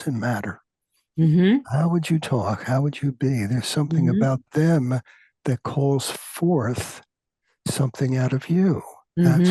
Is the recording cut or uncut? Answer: uncut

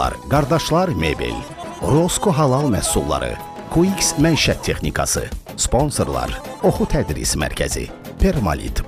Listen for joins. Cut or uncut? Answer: uncut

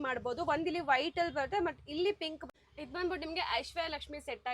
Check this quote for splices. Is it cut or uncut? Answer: cut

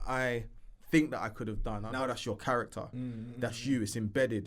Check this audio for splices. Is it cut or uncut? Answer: cut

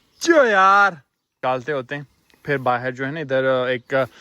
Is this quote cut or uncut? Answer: cut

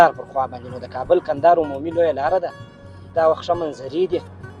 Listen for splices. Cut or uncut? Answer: cut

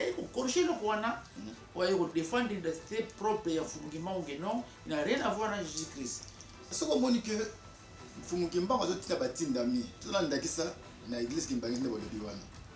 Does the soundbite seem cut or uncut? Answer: cut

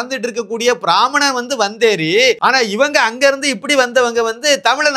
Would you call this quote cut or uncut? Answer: cut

